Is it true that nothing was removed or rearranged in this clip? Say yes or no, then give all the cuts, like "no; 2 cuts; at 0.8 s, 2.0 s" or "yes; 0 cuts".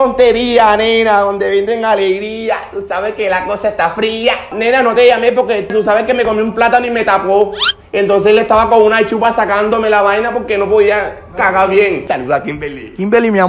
no; 2 cuts; at 4.4 s, 12.1 s